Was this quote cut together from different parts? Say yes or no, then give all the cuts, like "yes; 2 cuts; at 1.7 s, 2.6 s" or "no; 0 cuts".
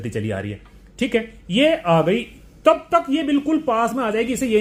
no; 0 cuts